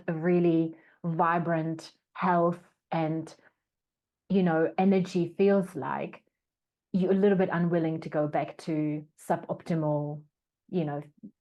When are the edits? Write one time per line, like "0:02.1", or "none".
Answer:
none